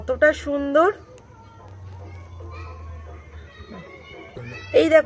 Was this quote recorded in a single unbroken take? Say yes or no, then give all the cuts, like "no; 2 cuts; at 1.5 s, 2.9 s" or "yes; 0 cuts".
yes; 0 cuts